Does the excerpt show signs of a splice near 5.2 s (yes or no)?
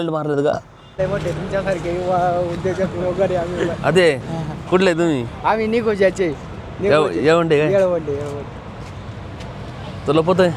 no